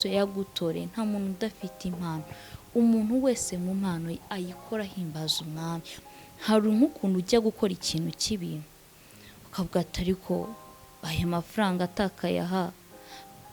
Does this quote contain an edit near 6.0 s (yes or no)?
yes